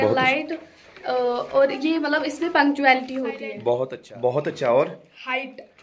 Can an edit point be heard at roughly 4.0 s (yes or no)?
yes